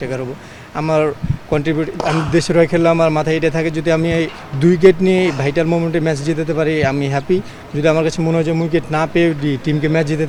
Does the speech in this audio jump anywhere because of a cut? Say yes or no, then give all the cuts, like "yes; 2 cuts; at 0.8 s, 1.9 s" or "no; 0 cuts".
no; 0 cuts